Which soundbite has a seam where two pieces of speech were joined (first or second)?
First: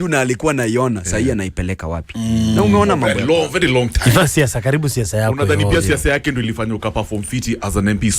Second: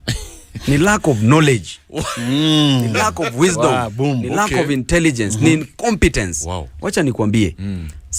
first